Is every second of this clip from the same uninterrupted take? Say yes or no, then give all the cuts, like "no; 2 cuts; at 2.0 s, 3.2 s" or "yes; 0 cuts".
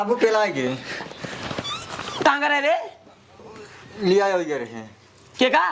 yes; 0 cuts